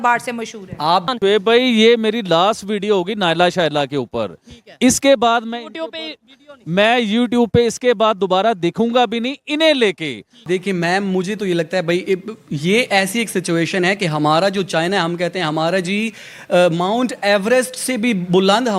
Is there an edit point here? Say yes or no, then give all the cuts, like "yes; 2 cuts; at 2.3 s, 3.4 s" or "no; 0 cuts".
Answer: yes; 2 cuts; at 1.1 s, 10.4 s